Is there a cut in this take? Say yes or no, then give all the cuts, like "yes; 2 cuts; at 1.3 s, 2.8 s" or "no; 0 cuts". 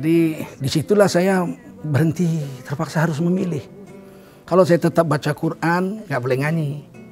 no; 0 cuts